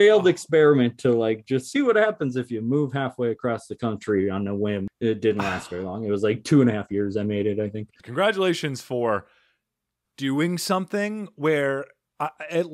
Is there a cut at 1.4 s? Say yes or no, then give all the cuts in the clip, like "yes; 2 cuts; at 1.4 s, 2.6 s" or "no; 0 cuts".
no; 2 cuts; at 4.9 s, 8.0 s